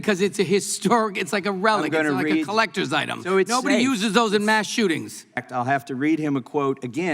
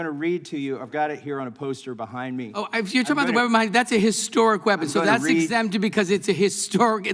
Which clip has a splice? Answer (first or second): first